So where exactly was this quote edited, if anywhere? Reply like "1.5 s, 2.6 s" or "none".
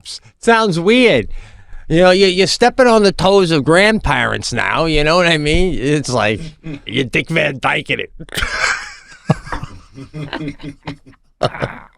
7.1 s